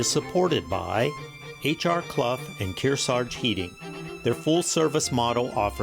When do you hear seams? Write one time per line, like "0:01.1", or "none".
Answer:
0:01.2